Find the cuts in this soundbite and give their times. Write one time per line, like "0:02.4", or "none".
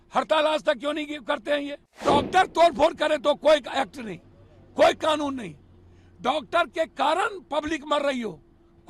0:02.0